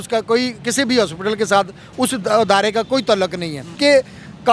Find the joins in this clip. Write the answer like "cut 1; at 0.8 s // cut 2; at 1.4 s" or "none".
cut 1; at 3.6 s